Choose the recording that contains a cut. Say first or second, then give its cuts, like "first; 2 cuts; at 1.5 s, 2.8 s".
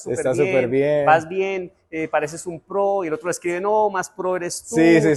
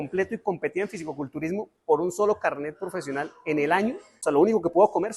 second; 1 cut; at 4.1 s